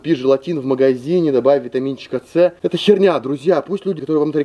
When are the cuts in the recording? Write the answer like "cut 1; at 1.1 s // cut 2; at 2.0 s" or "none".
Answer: none